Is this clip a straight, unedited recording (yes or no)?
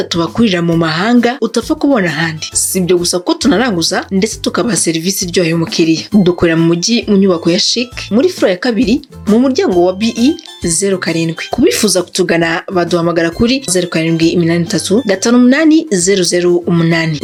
yes